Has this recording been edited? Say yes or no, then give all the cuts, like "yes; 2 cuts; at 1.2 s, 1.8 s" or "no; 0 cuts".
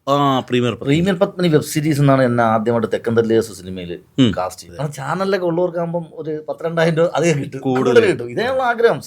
yes; 1 cut; at 4.7 s